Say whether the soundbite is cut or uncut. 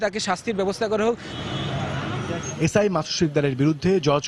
uncut